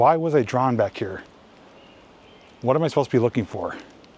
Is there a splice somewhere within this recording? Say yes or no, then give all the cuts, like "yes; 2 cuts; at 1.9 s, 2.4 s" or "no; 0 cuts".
no; 0 cuts